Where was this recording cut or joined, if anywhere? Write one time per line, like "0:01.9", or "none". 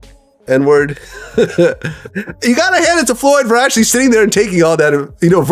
0:02.0